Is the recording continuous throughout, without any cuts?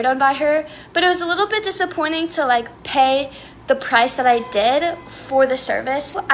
yes; 0 cuts

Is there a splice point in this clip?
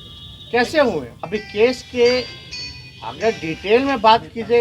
yes; 1 cut; at 1.2 s

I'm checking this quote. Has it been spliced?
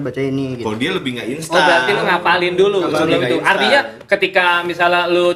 no; 0 cuts

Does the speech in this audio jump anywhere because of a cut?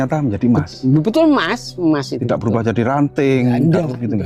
no; 0 cuts

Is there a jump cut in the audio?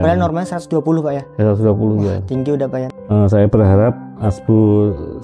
yes; 1 cut; at 2.8 s

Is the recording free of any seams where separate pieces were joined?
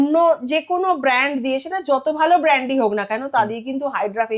yes; 0 cuts

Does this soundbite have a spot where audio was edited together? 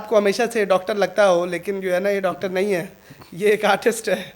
no; 0 cuts

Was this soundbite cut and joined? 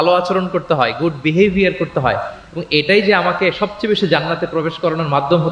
no; 0 cuts

